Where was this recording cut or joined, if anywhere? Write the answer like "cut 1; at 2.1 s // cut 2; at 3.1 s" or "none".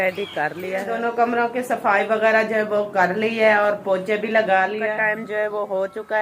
cut 1; at 0.9 s // cut 2; at 4.8 s